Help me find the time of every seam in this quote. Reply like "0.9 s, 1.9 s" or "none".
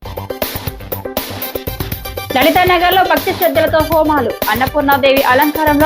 2.3 s